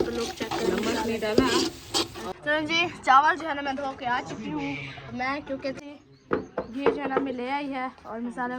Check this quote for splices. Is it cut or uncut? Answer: cut